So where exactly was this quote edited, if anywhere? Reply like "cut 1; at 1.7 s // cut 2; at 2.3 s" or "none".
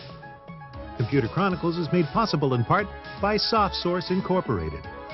cut 1; at 0.9 s